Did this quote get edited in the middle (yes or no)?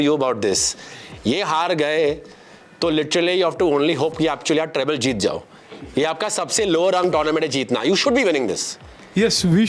no